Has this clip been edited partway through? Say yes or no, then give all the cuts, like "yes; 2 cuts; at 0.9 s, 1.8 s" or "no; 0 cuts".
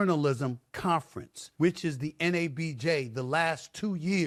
no; 0 cuts